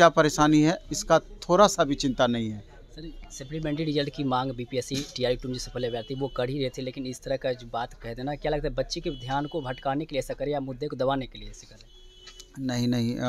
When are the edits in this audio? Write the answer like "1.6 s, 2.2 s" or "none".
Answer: none